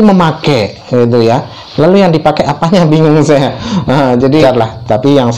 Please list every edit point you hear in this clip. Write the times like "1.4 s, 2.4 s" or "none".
4.4 s